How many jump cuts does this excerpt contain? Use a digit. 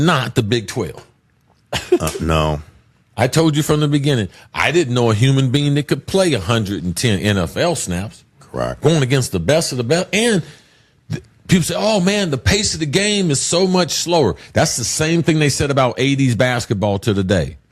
1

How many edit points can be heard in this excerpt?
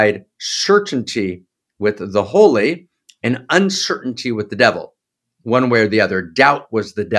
0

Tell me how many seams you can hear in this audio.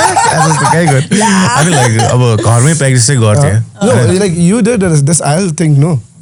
0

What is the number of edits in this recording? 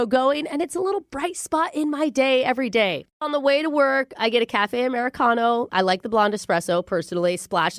1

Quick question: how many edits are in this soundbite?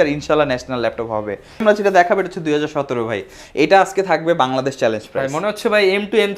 1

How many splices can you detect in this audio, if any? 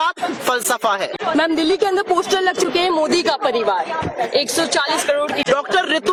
0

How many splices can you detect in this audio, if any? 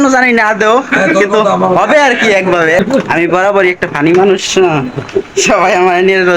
1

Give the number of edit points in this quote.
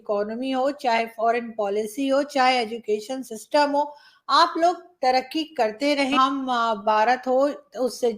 1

